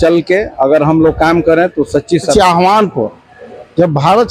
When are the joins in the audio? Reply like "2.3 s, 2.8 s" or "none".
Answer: 2.3 s